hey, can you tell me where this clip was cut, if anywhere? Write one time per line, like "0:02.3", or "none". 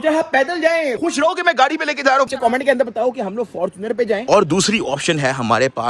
0:00.9
0:02.3
0:04.2